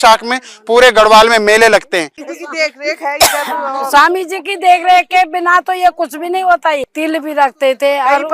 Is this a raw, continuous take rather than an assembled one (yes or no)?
no